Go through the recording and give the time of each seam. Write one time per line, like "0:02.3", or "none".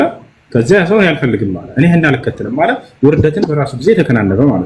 none